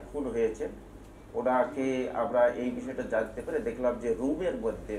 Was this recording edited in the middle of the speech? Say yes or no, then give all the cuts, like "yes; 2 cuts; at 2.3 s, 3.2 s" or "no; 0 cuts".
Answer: no; 0 cuts